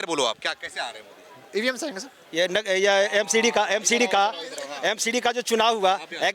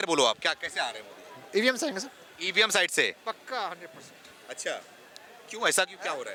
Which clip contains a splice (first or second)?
first